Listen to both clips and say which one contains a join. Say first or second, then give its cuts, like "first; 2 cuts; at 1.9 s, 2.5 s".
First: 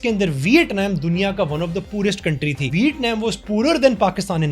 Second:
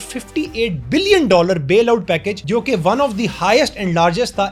first; 1 cut; at 2.7 s